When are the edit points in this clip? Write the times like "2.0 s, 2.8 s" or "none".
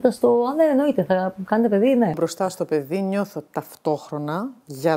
2.1 s

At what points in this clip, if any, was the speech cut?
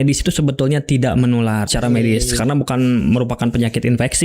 1.7 s

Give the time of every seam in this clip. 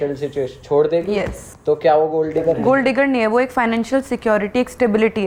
none

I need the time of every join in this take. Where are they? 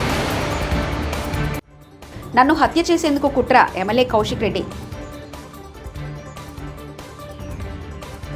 none

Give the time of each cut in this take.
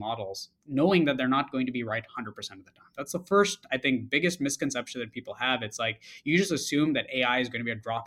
none

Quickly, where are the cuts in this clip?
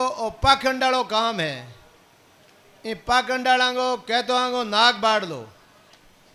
none

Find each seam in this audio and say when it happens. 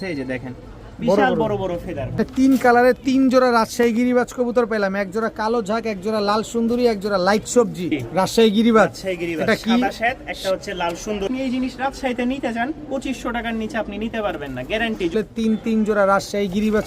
2.2 s, 8.0 s, 11.3 s, 15.1 s

